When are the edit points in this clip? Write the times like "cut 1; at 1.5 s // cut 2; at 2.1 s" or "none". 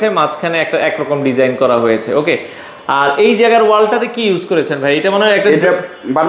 none